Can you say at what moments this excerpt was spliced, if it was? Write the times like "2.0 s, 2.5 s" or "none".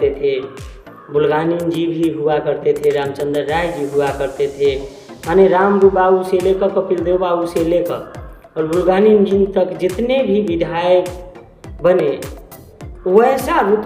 none